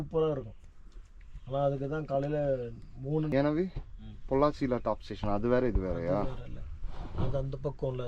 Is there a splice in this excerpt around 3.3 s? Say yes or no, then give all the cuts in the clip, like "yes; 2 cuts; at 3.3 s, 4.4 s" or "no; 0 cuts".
yes; 1 cut; at 3.3 s